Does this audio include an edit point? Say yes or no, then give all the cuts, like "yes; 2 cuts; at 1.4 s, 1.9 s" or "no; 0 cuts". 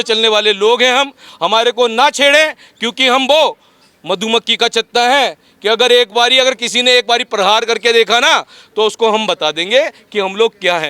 no; 0 cuts